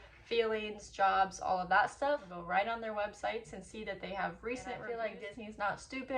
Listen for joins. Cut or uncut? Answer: cut